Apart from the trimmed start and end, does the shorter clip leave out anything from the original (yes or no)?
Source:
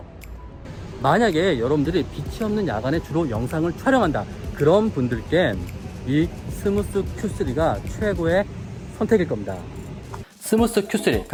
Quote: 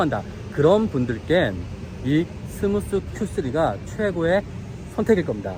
no